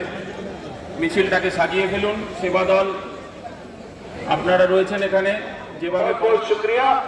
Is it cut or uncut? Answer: cut